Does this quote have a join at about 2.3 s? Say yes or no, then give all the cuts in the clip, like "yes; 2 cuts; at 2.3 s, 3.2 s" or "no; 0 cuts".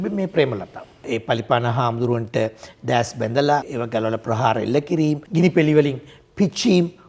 no; 3 cuts; at 1.0 s, 3.7 s, 5.2 s